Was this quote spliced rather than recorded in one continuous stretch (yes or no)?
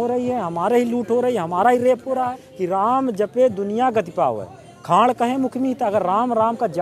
yes